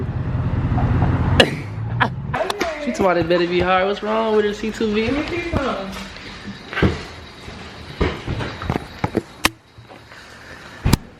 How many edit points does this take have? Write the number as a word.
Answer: one